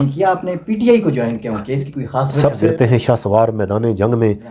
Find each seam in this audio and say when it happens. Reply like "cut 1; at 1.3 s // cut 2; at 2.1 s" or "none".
cut 1; at 2.6 s